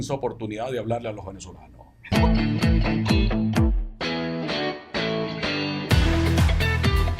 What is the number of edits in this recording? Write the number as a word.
one